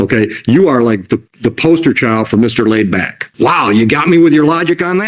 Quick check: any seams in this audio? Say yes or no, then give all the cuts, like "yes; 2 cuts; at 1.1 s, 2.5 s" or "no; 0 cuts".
yes; 1 cut; at 3.3 s